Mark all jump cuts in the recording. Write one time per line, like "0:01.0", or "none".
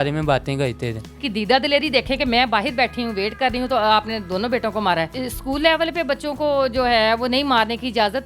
0:01.2
0:05.1

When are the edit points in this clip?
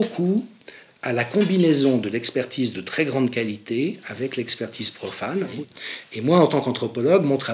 0:05.5

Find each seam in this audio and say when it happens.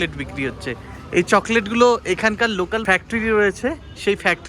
0:02.8

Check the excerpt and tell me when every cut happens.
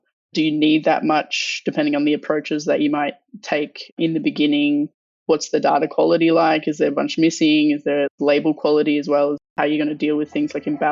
0:09.5

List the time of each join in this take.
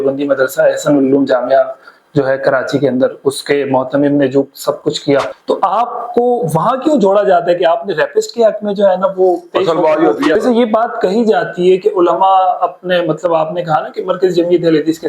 0:05.3
0:10.4

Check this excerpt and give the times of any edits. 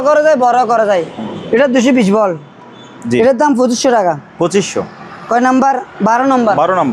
none

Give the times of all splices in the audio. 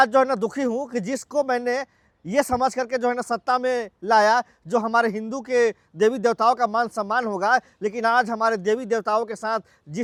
none

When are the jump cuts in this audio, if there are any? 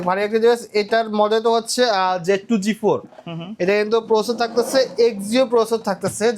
none

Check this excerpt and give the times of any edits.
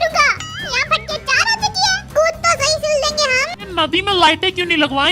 0:03.5

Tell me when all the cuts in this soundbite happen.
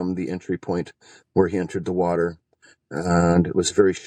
none

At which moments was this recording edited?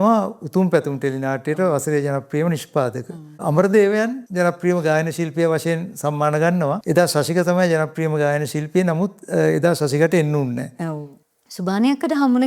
0:03.4
0:04.2
0:06.8
0:11.1

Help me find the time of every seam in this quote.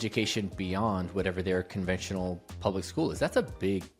none

